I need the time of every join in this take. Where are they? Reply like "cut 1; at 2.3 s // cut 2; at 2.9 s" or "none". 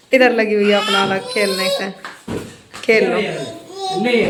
none